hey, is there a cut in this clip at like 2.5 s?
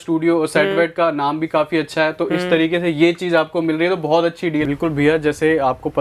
no; 1 cut; at 4.6 s

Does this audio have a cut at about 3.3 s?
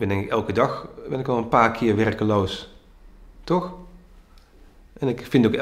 no; 0 cuts

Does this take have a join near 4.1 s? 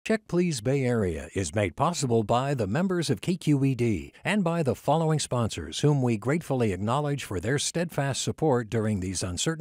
no; 0 cuts

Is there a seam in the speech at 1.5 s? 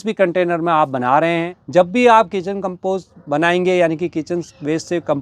yes; 1 cut; at 1.5 s

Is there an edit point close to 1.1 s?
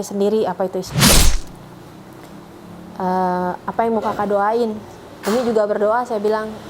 yes; 1 cut; at 1.1 s

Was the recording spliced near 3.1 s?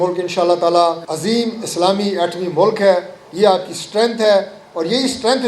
no; 1 cut; at 1.1 s

